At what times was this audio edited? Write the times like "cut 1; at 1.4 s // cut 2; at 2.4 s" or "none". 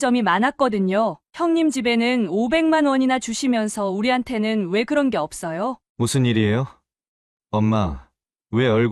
cut 1; at 5.8 s